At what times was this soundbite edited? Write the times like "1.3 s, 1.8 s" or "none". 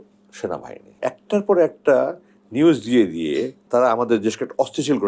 1.0 s, 3.6 s